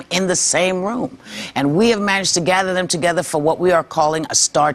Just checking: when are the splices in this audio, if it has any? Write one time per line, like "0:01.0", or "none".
0:00.9

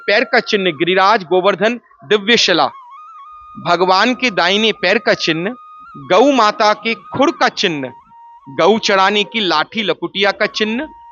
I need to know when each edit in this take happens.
none

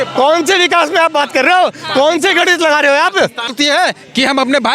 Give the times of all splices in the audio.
0:03.5

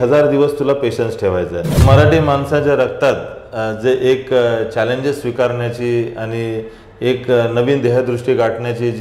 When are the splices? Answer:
0:01.8

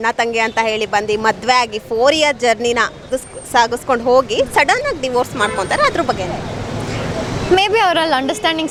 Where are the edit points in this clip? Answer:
none

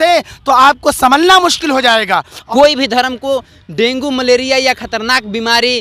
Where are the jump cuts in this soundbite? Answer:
none

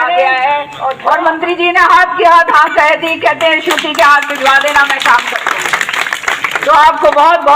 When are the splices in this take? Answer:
0:01.0

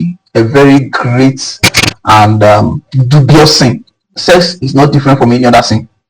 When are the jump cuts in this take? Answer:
0:04.1

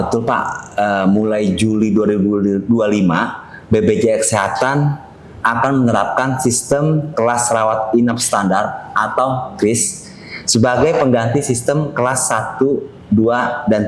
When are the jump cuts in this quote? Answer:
none

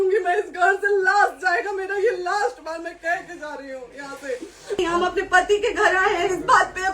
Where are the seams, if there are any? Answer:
0:04.8

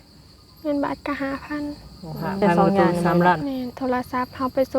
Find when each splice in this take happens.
0:03.4

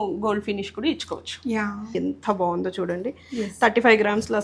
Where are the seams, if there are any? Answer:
0:01.9

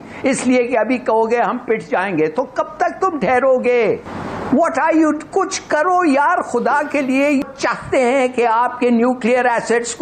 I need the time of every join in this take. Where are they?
none

